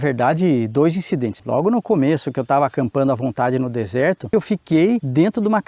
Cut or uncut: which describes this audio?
cut